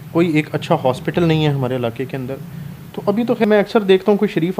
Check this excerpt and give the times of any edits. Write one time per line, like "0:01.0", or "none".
0:03.4